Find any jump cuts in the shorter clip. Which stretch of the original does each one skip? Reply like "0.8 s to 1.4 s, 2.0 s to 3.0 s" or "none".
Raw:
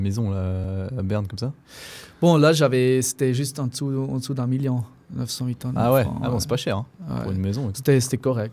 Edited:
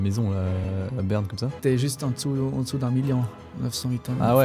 1.6 s to 3.1 s